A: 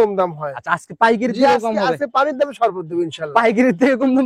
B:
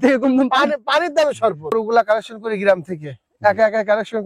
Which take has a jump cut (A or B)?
B